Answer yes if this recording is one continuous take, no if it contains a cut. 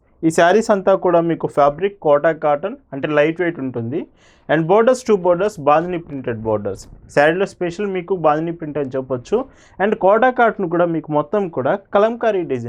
yes